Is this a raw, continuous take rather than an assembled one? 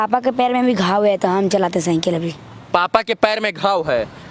yes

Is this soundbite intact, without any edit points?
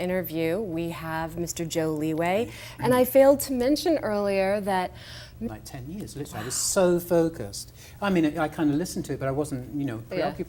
yes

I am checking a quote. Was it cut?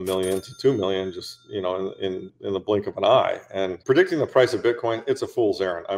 yes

